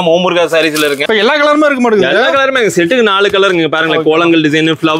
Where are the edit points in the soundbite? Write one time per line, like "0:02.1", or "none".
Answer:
0:01.0